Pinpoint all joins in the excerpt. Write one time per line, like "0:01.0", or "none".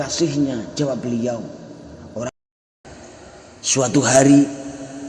0:02.3

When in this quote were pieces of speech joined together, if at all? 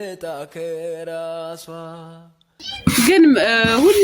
0:02.3

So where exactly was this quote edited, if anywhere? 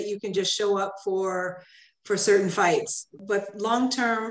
0:03.2

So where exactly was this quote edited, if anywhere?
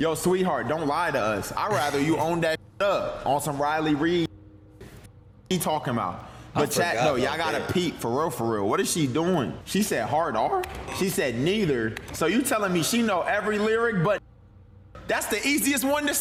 none

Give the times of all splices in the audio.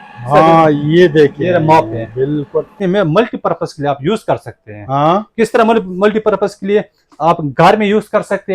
0:02.7

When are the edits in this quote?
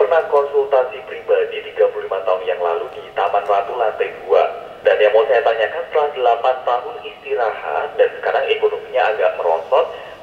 0:04.8

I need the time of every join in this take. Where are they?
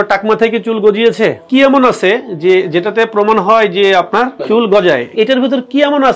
0:01.4
0:04.4
0:05.1

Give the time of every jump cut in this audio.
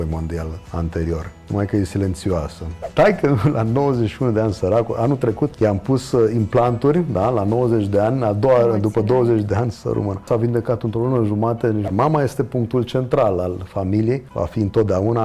0:01.0
0:02.8
0:05.5
0:10.3
0:11.9
0:14.3

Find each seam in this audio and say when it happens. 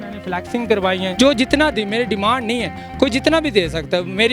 0:01.1

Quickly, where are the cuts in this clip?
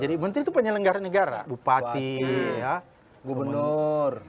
0:01.4

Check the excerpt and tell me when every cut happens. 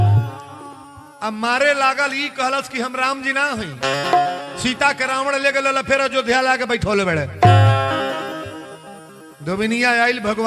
none

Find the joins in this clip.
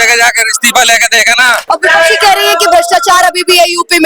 0:01.6

